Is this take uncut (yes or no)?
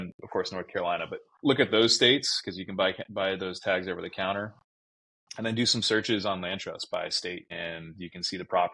yes